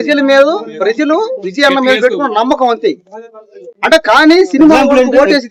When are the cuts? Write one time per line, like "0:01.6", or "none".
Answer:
none